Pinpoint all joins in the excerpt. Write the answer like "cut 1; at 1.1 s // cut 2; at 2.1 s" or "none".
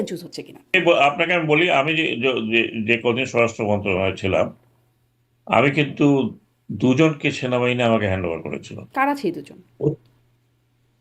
cut 1; at 0.7 s // cut 2; at 8.8 s